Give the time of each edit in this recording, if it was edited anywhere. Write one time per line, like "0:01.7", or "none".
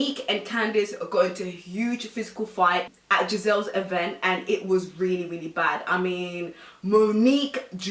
none

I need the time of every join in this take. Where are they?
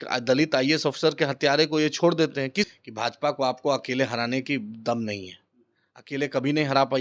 0:02.7

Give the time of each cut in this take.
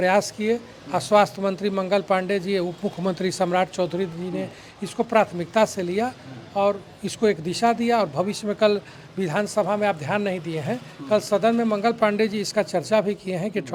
none

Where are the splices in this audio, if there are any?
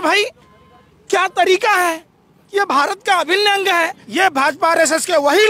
0:04.0

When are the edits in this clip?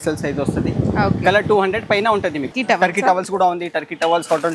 0:02.5

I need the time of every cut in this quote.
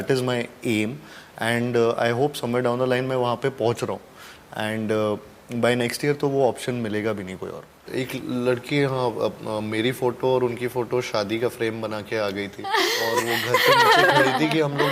0:07.8

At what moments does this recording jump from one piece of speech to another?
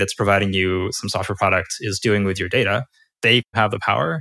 0:03.3

